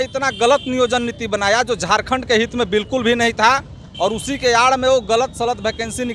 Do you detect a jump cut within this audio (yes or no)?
no